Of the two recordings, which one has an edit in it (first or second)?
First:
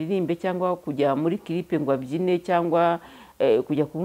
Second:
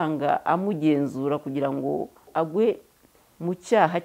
second